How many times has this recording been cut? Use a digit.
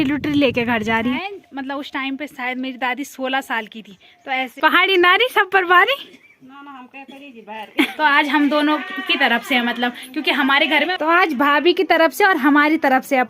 4